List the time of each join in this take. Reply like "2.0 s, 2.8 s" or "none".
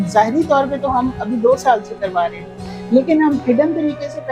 none